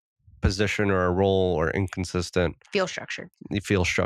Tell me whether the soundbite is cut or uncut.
uncut